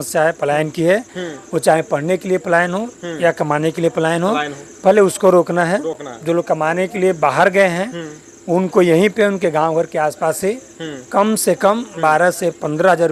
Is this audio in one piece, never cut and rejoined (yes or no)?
yes